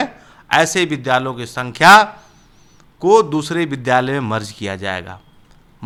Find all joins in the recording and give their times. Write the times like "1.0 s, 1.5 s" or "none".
none